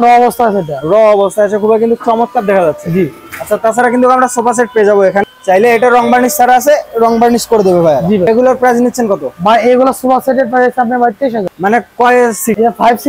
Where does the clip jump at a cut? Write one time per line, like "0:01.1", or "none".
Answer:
none